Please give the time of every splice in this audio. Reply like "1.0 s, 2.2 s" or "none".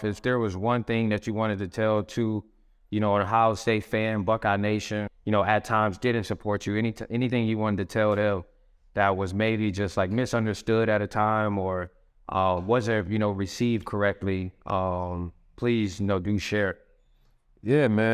5.1 s